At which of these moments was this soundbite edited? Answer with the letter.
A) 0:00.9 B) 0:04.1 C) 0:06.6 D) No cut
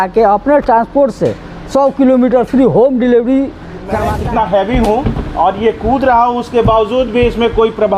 B